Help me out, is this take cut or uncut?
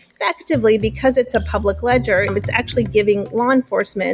cut